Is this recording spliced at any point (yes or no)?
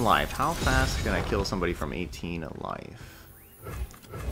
no